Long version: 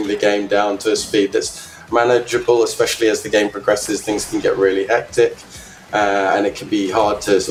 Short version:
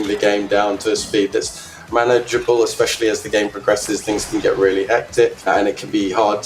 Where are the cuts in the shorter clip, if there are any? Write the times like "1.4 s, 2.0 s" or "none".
5.5 s

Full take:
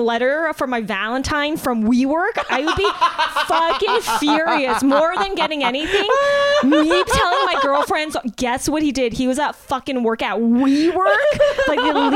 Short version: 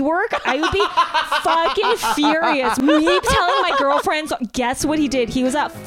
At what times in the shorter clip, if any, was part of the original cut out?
2.8 s

